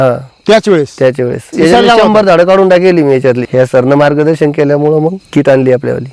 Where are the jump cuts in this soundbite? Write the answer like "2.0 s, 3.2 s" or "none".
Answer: 1.4 s, 3.4 s, 5.2 s